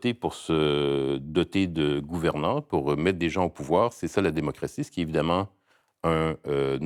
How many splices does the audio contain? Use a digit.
0